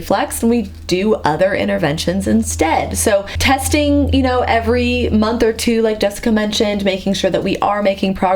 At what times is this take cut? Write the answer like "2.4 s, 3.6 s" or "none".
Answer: 3.3 s

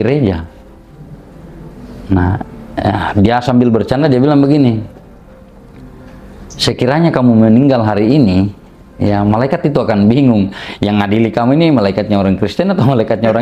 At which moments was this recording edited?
none

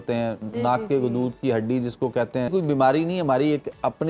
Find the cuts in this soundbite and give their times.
2.5 s

